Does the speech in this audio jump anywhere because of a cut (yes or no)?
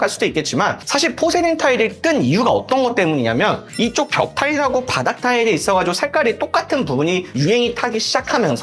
no